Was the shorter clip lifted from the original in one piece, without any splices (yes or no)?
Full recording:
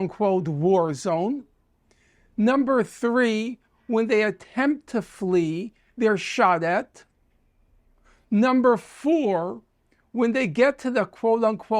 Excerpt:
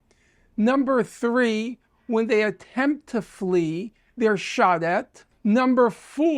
no